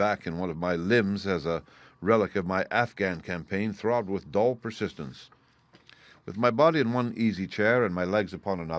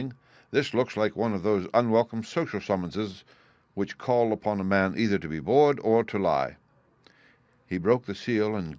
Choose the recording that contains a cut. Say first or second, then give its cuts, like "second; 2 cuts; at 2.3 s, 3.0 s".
first; 1 cut; at 3.4 s